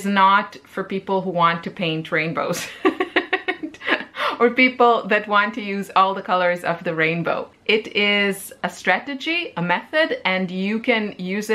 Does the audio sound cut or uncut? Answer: cut